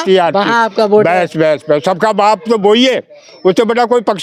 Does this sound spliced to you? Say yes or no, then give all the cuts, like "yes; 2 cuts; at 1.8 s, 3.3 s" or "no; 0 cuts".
no; 0 cuts